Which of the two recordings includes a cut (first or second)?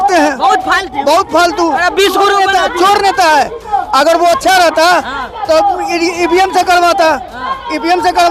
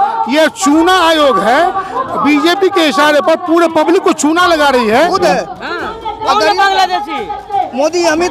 second